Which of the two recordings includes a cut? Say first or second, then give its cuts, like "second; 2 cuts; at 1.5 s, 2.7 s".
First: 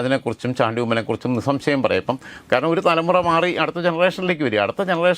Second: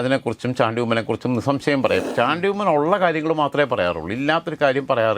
second; 1 cut; at 2.1 s